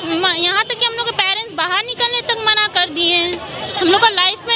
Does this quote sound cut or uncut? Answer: uncut